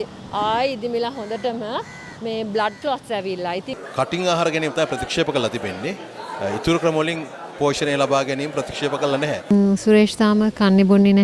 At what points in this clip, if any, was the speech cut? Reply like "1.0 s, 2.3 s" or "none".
3.7 s, 9.5 s